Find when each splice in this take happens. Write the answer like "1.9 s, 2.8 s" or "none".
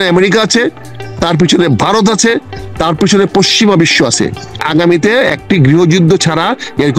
4.6 s